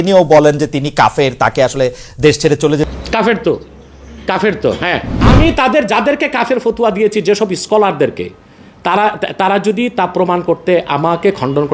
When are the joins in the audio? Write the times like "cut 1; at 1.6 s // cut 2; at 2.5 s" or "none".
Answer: cut 1; at 5.2 s